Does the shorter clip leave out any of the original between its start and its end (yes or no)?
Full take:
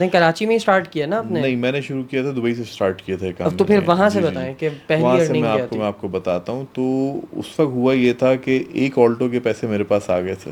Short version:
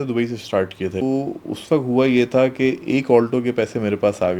yes